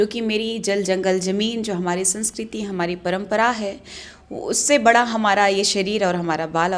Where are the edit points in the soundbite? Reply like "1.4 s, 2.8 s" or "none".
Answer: none